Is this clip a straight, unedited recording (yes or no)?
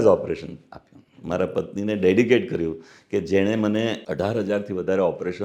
no